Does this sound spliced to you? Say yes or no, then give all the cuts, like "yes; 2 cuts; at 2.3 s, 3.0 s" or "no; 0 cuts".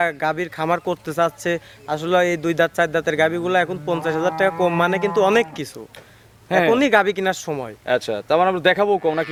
no; 0 cuts